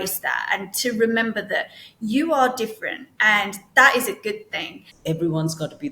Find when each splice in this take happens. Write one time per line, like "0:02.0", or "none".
0:04.9